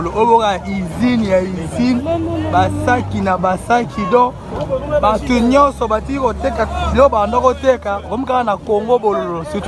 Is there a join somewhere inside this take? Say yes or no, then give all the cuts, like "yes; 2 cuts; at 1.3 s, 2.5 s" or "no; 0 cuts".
no; 0 cuts